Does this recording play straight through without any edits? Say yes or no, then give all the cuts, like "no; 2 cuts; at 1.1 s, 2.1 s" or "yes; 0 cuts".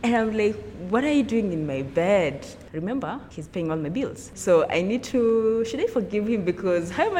no; 3 cuts; at 2.5 s, 3.3 s, 4.3 s